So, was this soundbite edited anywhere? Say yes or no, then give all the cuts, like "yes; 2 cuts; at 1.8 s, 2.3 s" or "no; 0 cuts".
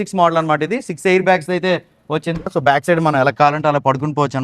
yes; 1 cut; at 2.5 s